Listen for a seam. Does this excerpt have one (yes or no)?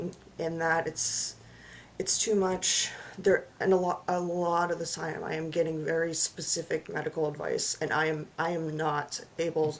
no